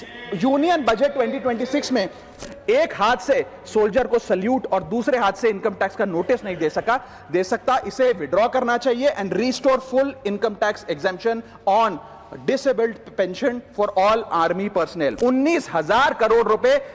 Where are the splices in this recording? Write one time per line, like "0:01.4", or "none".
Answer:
0:02.3
0:15.1